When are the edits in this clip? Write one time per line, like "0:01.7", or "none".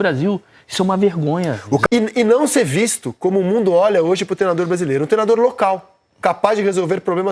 0:01.8